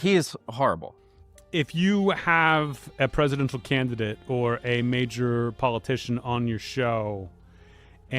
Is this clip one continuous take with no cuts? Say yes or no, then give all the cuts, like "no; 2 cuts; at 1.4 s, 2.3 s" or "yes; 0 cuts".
no; 1 cut; at 0.9 s